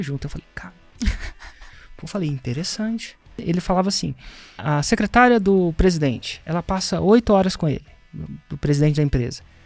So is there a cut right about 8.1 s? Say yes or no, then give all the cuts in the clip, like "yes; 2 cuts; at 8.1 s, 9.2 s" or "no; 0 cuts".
no; 2 cuts; at 3.4 s, 4.6 s